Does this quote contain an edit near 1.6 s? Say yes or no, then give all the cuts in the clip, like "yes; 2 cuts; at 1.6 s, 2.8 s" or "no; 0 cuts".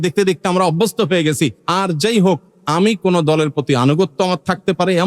yes; 2 cuts; at 1.6 s, 2.5 s